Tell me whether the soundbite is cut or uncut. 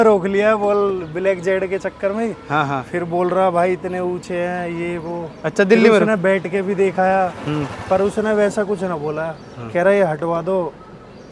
uncut